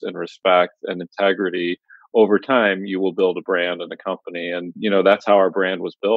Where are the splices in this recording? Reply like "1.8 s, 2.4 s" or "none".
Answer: 4.8 s